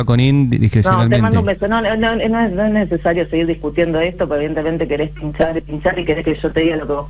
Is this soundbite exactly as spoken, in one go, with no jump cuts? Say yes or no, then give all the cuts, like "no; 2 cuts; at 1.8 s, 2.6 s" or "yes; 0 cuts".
yes; 0 cuts